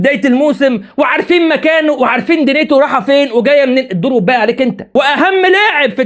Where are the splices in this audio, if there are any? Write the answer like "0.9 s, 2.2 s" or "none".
4.9 s

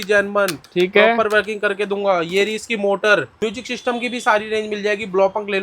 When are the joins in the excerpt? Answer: 3.3 s

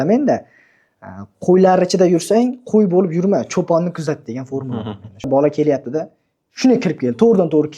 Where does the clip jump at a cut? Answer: 5.3 s

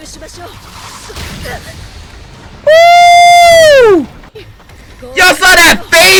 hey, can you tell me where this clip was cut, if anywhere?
none

